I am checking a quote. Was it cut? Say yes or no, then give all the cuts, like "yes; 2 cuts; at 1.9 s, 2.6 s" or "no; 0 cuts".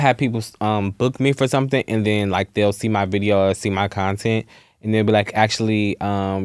no; 0 cuts